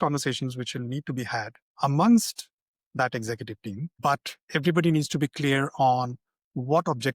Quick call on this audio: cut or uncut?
cut